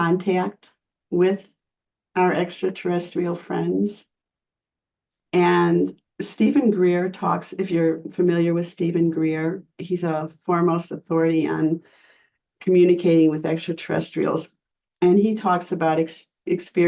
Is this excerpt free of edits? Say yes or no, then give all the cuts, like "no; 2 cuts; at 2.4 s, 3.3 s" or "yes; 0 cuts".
yes; 0 cuts